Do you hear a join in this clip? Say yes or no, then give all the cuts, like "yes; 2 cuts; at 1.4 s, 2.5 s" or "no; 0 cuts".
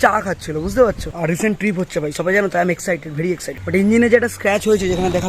yes; 2 cuts; at 1.1 s, 3.6 s